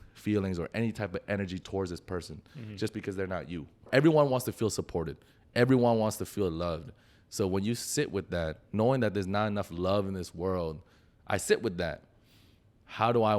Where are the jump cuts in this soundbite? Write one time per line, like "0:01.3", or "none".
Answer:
0:03.9

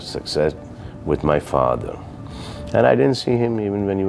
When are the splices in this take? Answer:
none

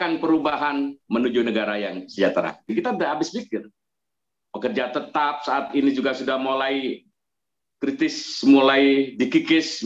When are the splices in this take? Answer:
0:02.7

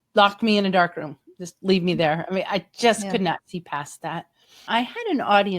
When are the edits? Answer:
0:04.6

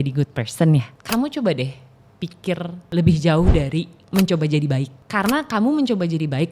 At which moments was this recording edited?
0:00.9
0:02.9
0:04.0
0:05.0

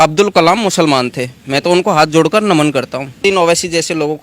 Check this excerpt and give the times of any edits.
0:03.2

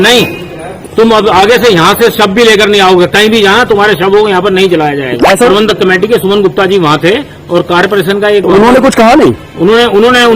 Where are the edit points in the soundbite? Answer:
0:05.5

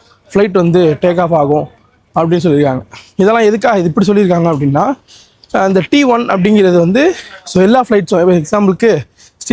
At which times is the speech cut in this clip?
none

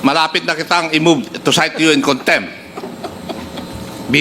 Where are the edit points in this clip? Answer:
none

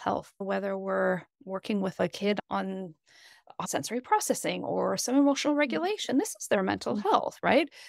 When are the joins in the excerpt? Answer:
0:03.6

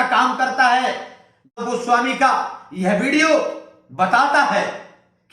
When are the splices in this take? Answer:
0:01.6

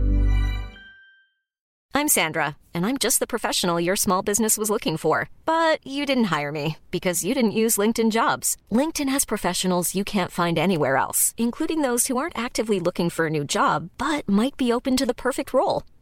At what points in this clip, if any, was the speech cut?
0:01.7

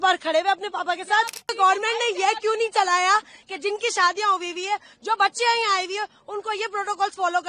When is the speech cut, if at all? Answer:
0:01.5

